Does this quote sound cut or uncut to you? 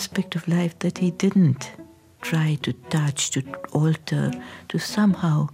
uncut